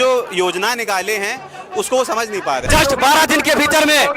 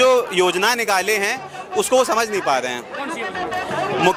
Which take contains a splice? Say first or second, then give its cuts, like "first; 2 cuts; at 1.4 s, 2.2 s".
first; 1 cut; at 2.6 s